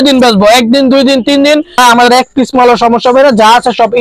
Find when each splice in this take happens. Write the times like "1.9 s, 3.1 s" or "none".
1.8 s